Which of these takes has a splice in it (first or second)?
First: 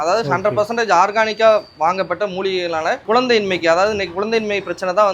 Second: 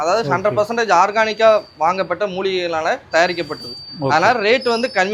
first